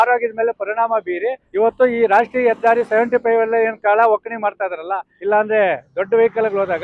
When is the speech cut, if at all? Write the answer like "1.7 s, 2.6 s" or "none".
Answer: 1.4 s, 5.1 s